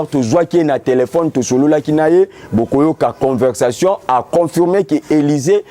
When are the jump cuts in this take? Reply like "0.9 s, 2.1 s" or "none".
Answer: none